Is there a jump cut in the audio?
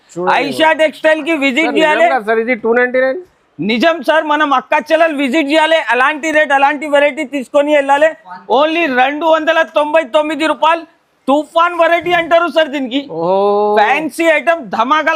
no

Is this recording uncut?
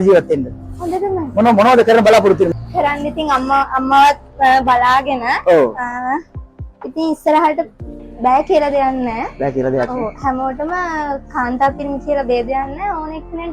no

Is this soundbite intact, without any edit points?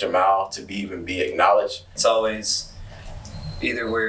no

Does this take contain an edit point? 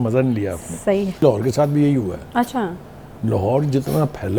yes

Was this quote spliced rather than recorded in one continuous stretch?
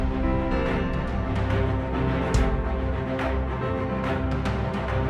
no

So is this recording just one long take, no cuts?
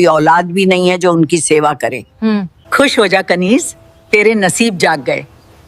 no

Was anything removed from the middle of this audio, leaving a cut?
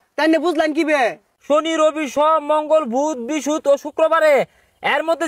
yes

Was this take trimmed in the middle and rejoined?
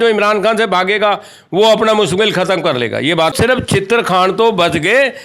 yes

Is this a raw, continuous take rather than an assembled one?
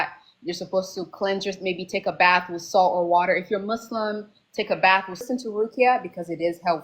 no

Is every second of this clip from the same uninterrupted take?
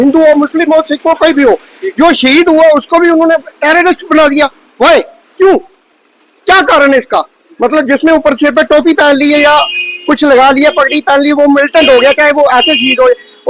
yes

